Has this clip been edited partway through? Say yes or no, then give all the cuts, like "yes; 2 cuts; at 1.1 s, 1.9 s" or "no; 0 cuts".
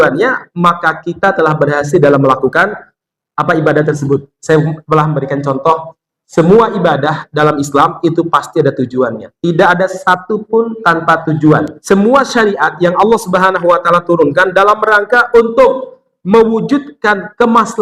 yes; 1 cut; at 11.7 s